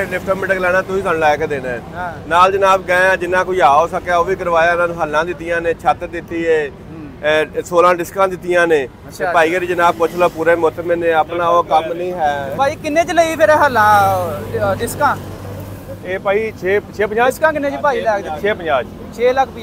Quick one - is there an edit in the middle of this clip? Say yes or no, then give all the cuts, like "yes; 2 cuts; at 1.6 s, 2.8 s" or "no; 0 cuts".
no; 0 cuts